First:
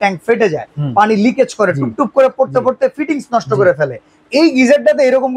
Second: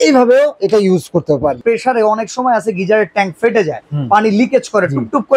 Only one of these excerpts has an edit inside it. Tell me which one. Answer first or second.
second